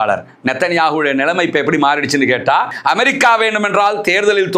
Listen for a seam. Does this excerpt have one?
yes; 1 cut; at 2.7 s

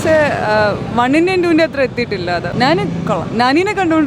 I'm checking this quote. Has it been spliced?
no; 0 cuts

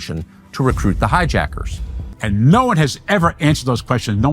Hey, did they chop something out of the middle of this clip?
yes; 1 cut; at 2.1 s

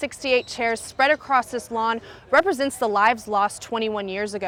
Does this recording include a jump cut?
no; 0 cuts

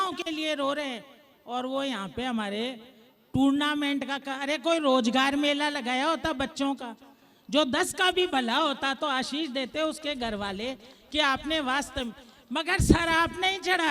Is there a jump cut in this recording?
no; 0 cuts

